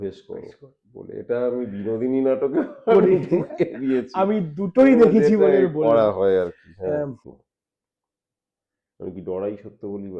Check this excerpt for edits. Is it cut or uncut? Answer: cut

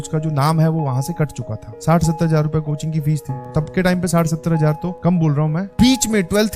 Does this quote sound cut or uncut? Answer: cut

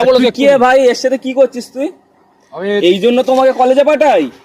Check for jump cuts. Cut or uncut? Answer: uncut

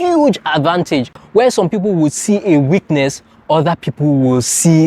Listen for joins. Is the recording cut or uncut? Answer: cut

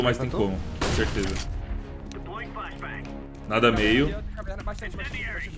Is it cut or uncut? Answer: uncut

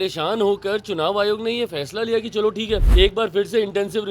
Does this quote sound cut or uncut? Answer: cut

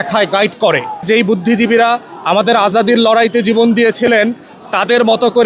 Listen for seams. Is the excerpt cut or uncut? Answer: cut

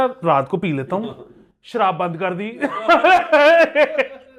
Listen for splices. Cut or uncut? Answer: uncut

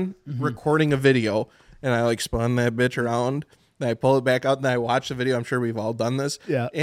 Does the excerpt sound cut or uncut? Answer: uncut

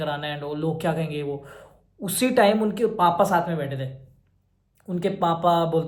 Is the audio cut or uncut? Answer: uncut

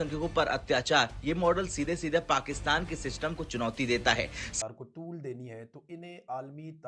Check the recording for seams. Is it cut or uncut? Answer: cut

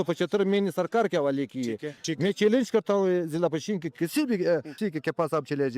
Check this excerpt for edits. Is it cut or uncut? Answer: cut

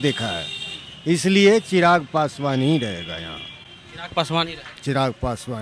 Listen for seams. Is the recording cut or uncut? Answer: uncut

